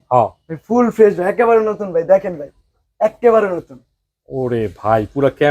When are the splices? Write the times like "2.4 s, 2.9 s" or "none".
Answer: none